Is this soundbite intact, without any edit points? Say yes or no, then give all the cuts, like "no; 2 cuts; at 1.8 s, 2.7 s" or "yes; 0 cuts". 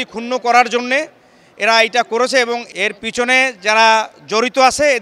yes; 0 cuts